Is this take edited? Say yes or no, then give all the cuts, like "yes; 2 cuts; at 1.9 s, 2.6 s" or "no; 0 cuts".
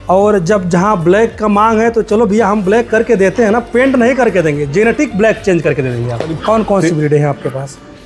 yes; 1 cut; at 6.4 s